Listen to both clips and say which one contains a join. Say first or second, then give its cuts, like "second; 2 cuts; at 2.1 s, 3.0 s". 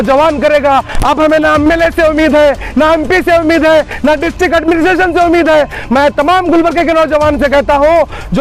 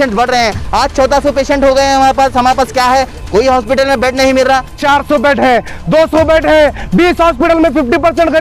second; 1 cut; at 4.8 s